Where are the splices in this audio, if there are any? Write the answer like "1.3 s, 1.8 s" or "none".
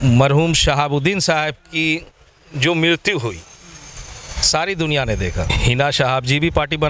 5.5 s